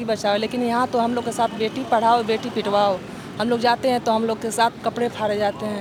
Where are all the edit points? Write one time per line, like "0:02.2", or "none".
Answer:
none